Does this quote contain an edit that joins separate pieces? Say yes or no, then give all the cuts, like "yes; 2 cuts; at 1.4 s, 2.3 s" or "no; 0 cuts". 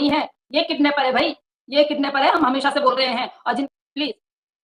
yes; 1 cut; at 3.7 s